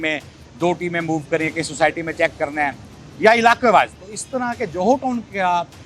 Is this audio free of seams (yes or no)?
yes